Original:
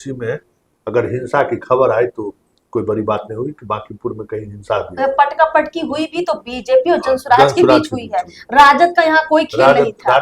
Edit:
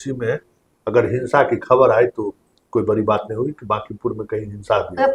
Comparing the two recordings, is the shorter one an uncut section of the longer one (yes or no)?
yes